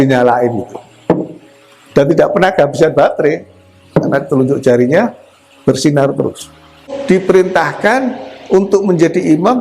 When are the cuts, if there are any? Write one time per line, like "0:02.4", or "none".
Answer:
0:07.0